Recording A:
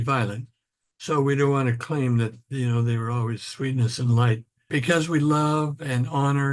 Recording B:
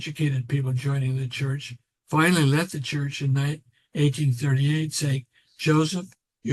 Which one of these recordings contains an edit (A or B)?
A